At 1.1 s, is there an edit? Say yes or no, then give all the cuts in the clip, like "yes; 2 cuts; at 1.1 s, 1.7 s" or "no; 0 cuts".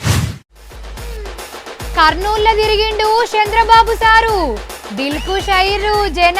yes; 1 cut; at 1.1 s